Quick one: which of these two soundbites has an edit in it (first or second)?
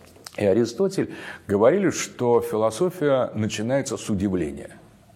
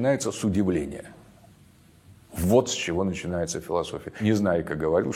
second